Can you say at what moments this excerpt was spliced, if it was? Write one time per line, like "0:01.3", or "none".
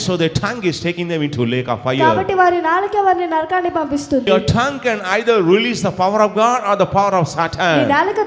0:04.3